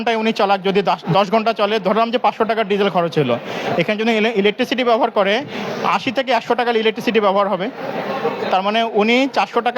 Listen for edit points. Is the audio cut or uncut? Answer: uncut